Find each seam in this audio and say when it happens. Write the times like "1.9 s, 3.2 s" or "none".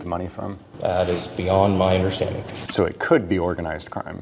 2.6 s